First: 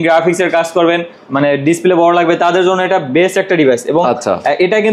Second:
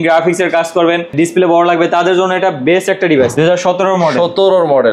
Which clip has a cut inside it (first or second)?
second